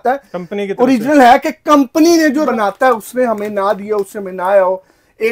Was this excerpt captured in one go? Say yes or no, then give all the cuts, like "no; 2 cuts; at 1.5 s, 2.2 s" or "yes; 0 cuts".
no; 1 cut; at 2.5 s